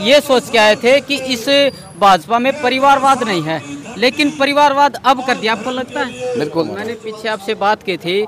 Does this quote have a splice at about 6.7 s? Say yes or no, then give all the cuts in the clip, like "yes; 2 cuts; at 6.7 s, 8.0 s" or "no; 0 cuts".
yes; 1 cut; at 6.7 s